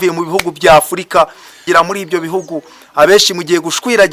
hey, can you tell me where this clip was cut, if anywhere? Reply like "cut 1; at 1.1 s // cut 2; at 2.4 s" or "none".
cut 1; at 1.6 s